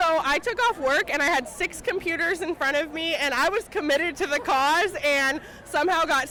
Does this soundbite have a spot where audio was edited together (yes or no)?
no